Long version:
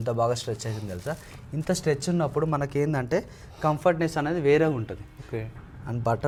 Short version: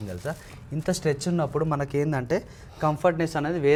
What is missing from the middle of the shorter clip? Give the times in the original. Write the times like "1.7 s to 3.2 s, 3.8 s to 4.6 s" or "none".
none